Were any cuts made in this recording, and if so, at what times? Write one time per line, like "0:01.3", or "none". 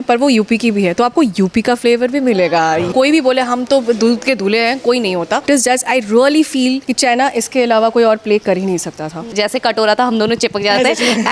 0:02.9
0:05.4
0:06.9
0:09.3